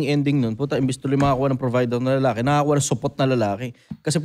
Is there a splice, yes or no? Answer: no